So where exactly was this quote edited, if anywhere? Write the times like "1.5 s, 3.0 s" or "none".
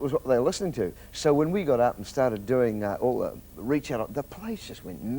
0.9 s